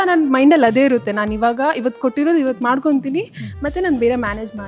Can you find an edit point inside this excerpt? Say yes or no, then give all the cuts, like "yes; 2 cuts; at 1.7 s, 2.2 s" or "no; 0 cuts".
no; 0 cuts